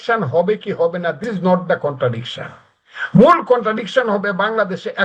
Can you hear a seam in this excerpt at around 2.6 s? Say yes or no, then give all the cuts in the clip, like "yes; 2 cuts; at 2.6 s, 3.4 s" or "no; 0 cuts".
no; 1 cut; at 1.2 s